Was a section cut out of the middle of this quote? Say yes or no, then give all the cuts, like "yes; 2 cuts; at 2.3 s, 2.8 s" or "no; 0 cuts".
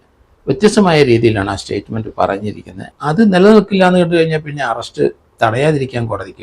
yes; 1 cut; at 2.8 s